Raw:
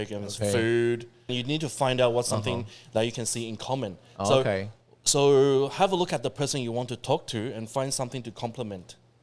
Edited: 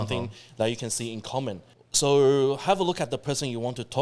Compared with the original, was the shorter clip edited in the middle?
yes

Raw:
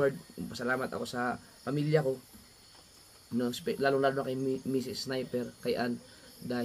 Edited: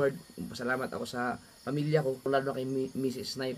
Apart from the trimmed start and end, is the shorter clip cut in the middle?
yes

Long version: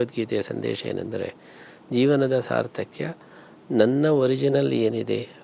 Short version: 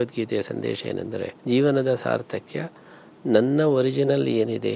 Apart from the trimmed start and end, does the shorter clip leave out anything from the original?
yes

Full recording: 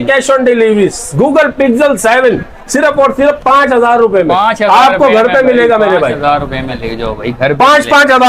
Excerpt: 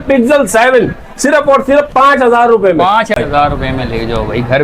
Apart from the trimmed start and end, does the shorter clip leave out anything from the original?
yes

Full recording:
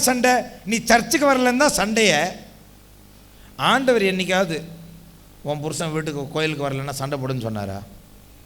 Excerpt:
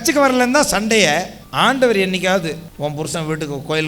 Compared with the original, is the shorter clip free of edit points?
no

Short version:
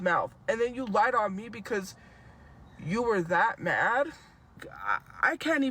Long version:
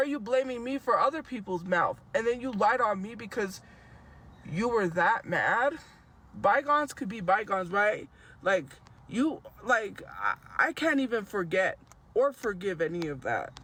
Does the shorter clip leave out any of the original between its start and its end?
yes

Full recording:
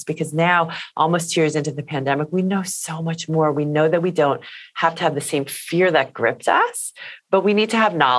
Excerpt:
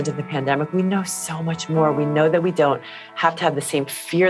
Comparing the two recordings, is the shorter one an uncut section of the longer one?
yes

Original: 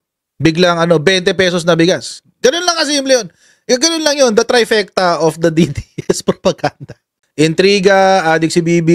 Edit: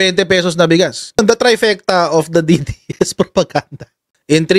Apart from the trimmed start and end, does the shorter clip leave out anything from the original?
yes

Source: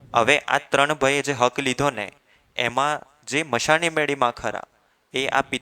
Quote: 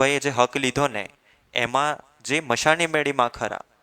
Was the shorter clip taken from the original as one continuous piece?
yes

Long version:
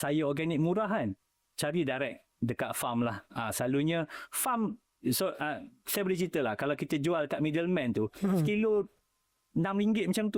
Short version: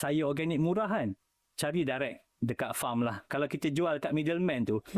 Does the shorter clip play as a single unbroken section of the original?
no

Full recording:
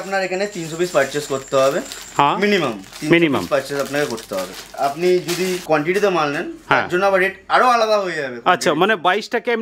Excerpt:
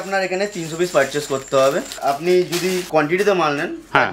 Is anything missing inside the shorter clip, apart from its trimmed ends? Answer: yes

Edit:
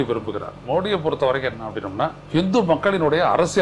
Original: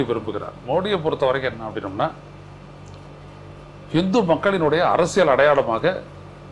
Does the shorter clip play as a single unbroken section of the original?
no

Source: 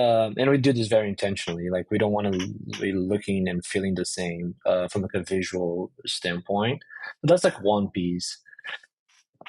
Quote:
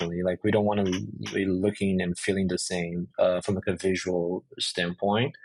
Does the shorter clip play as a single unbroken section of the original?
yes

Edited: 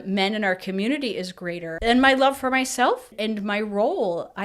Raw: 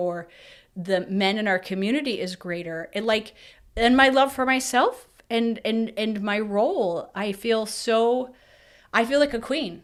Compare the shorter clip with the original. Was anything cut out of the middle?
yes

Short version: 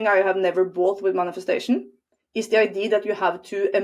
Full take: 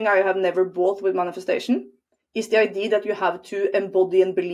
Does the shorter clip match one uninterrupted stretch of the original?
yes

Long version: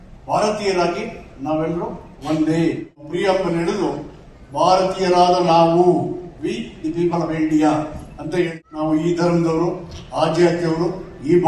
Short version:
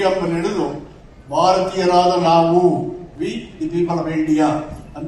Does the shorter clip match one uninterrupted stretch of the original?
yes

